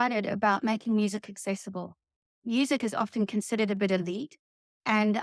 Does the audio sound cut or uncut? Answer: cut